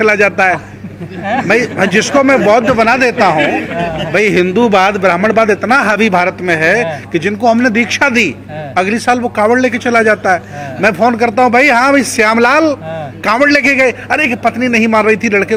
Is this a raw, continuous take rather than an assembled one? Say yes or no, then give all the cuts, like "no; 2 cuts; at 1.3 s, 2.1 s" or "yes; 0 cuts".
yes; 0 cuts